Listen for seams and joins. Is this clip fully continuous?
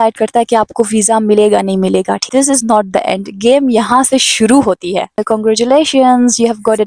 no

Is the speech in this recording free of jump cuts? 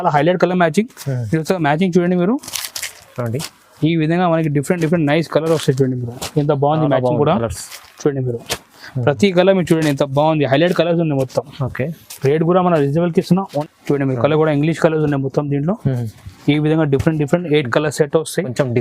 no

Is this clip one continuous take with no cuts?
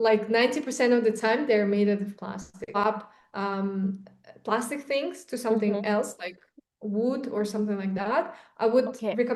yes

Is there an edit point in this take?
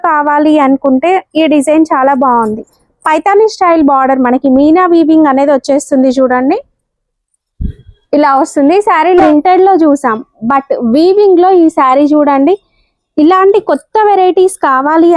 yes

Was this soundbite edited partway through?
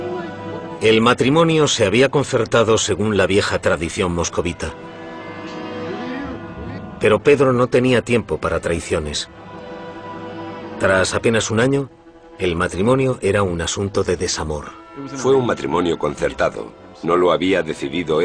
no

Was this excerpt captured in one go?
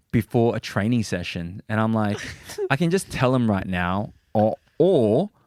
yes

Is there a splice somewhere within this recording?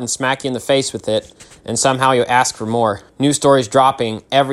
yes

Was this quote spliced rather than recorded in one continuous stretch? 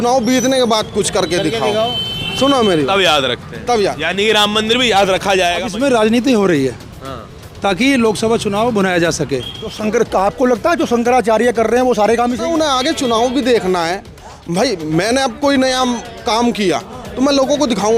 yes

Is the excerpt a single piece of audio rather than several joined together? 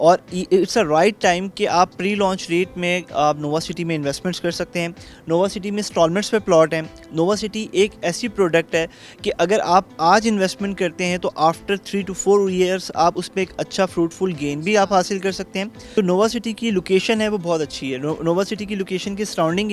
no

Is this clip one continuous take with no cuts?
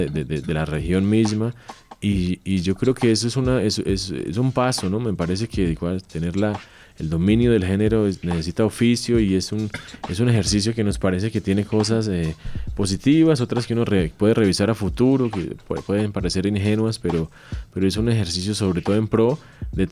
yes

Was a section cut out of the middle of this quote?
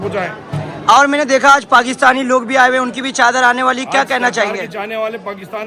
no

